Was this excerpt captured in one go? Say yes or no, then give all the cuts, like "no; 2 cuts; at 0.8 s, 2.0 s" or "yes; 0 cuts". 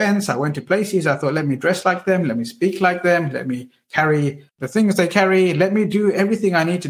yes; 0 cuts